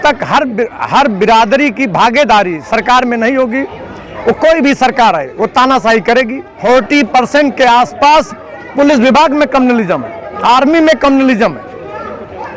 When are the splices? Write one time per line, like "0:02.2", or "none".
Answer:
0:06.5